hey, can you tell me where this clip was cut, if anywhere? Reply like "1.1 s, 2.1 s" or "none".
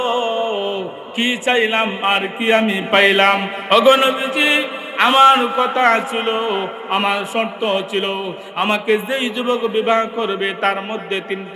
1.0 s